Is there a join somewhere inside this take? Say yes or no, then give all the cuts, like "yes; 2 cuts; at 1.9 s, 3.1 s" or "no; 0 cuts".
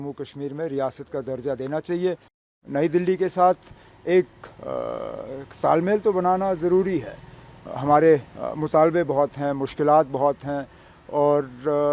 yes; 1 cut; at 2.5 s